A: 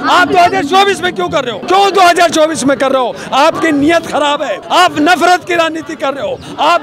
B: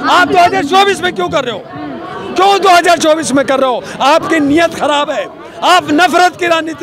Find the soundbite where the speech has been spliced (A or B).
A